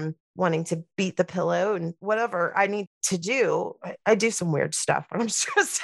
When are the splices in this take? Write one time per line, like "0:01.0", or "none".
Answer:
0:00.9
0:03.0